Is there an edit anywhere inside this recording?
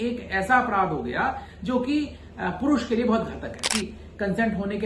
yes; 1 cut; at 3.7 s

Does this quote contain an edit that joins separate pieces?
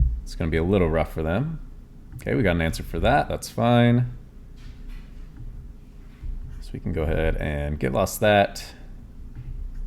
no; 0 cuts

